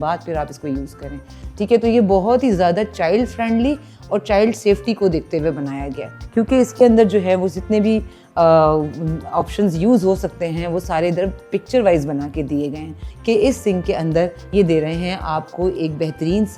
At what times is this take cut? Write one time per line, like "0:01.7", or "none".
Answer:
0:01.4
0:06.1
0:13.1